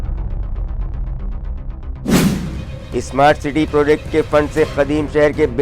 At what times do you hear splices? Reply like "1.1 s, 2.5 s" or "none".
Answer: none